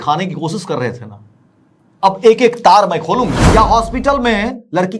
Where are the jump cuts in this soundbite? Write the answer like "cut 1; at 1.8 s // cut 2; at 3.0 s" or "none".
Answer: cut 1; at 3.5 s